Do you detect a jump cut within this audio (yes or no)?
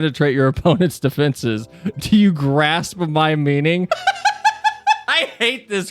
yes